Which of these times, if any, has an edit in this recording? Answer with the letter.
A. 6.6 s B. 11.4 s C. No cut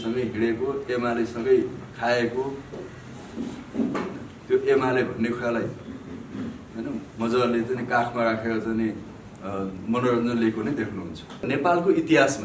B